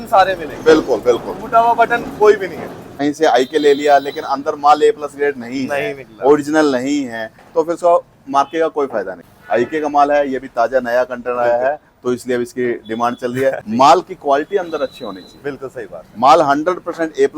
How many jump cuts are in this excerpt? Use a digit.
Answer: 3